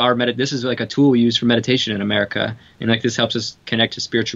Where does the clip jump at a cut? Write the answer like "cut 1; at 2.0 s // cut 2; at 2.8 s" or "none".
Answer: none